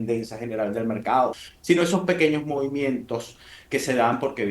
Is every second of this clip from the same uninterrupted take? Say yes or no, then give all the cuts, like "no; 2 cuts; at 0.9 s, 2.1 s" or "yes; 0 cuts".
no; 1 cut; at 1.3 s